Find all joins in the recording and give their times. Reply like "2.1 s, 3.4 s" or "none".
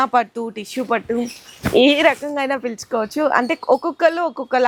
none